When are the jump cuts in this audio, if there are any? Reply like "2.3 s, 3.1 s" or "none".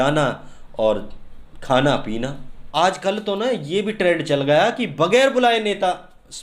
2.6 s